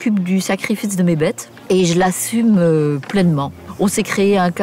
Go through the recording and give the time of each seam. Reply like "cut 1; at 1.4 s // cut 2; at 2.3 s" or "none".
cut 1; at 1.5 s // cut 2; at 3.7 s